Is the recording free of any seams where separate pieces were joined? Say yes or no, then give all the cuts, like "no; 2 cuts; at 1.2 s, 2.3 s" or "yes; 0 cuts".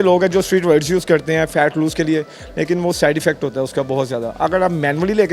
yes; 0 cuts